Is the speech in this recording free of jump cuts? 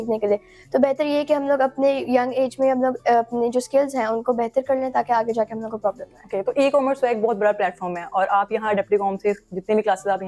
yes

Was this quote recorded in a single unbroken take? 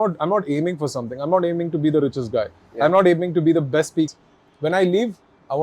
no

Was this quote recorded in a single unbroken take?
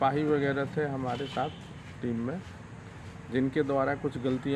yes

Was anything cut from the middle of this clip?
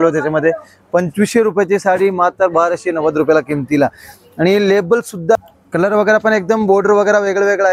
yes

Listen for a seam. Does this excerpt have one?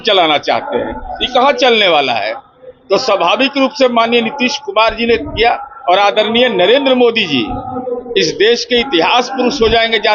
no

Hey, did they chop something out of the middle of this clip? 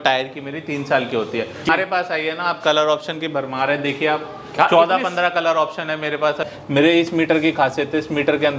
yes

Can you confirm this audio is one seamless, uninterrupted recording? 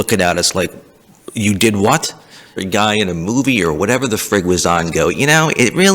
no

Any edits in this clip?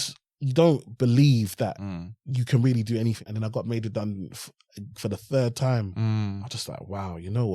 yes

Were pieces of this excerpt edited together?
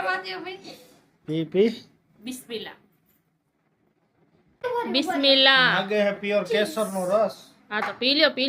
yes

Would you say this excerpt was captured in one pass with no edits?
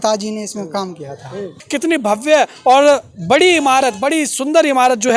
no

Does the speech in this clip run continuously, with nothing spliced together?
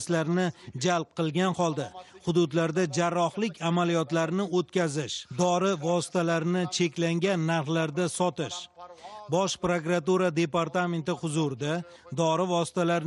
yes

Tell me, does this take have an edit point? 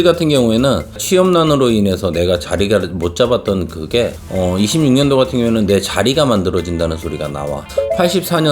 yes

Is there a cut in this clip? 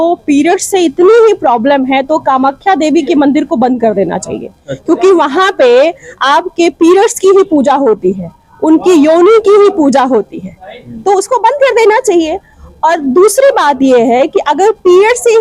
no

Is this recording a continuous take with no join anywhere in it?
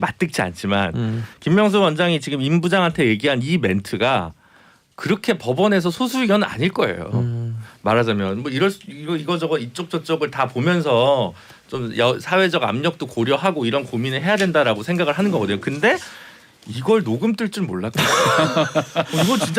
yes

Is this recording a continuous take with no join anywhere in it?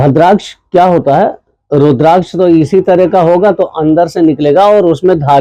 yes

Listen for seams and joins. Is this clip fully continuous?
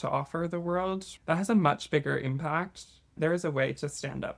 no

